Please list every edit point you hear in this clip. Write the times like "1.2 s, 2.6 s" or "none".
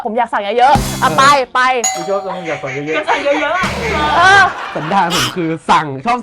4.7 s